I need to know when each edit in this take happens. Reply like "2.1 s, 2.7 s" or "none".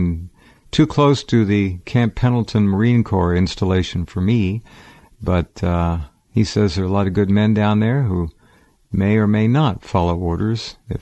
8.4 s